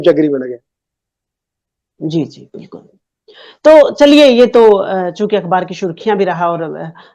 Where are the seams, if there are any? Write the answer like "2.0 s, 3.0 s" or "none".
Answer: none

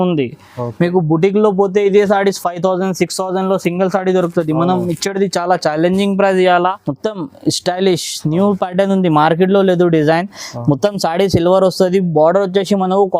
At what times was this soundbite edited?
6.9 s

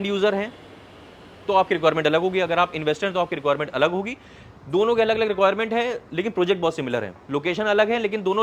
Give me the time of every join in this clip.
none

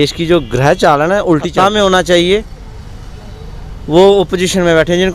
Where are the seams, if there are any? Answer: 1.5 s

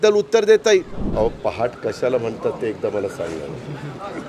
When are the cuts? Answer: 1.0 s

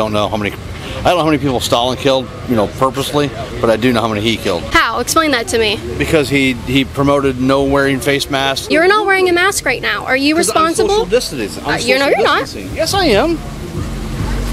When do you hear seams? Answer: 4.7 s, 8.6 s

